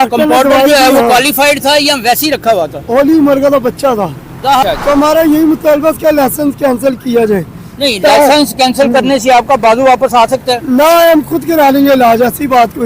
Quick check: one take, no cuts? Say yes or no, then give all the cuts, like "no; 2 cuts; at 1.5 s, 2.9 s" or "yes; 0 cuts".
no; 1 cut; at 4.6 s